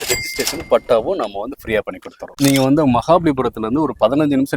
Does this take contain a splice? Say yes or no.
yes